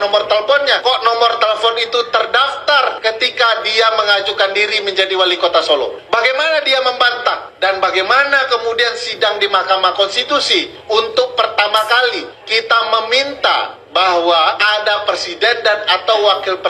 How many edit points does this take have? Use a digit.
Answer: 8